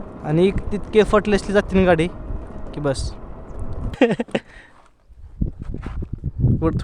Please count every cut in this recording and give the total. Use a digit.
1